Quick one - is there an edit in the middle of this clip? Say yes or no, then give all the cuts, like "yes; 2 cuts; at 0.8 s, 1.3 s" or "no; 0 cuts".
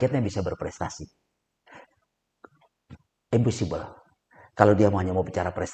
no; 0 cuts